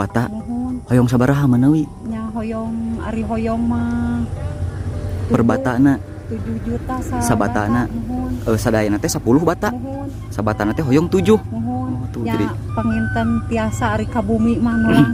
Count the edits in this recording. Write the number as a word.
zero